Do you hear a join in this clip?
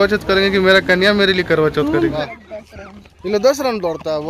yes; 1 cut; at 2.2 s

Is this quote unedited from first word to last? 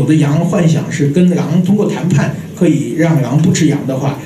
yes; 0 cuts

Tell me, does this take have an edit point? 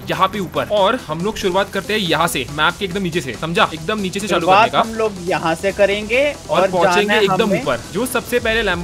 yes; 1 cut; at 7.8 s

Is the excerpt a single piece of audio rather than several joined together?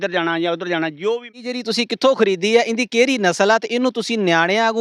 no; 1 cut; at 1.6 s

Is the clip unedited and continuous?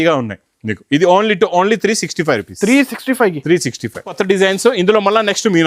no; 1 cut; at 4.2 s

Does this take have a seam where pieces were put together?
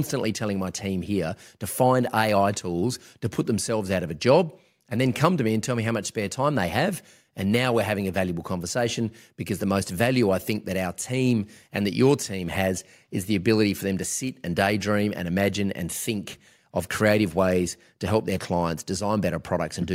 no; 0 cuts

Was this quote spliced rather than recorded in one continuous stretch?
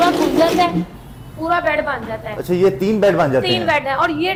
no; 0 cuts

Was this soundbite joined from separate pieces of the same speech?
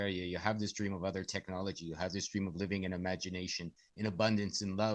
no; 0 cuts

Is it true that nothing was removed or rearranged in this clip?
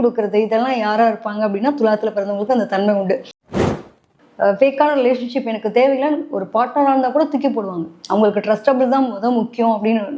no; 1 cut; at 3.6 s

